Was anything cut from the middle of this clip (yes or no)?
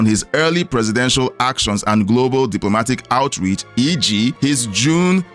no